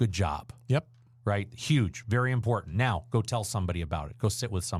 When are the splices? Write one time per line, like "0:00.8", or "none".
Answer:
none